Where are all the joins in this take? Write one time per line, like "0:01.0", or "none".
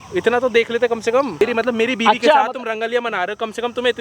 0:01.4